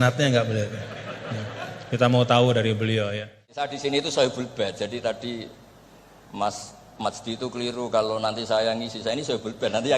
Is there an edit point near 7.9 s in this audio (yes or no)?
no